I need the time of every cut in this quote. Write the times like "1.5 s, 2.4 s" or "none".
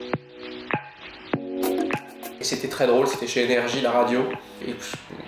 2.4 s